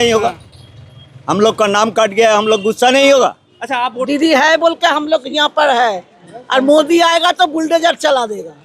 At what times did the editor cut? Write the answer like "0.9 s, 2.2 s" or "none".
4.0 s

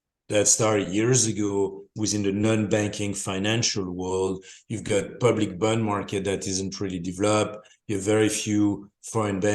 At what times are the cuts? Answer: 1.9 s

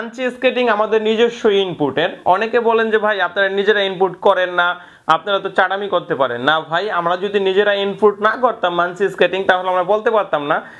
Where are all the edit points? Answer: none

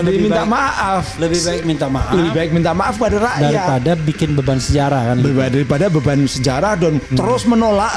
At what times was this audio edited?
7.0 s

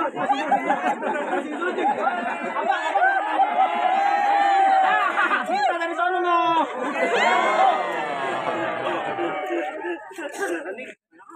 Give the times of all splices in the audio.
7.9 s

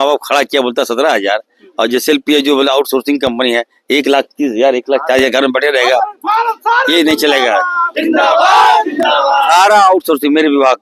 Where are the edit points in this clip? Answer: none

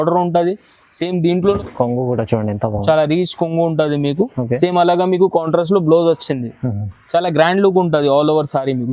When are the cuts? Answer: 1.6 s

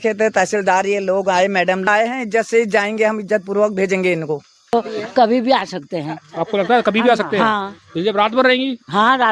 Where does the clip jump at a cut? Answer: 1.9 s, 4.7 s

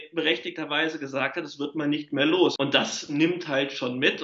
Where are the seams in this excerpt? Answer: 2.6 s

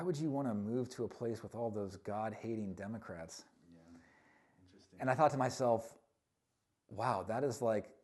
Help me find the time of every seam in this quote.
none

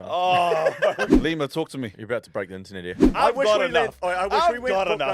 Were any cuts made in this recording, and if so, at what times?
1.1 s, 3.0 s

